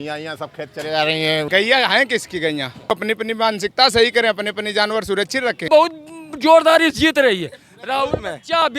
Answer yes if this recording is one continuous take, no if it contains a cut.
no